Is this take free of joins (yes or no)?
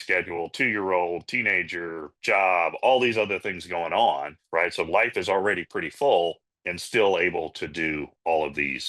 yes